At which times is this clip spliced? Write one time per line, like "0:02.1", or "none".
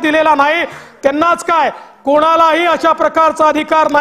none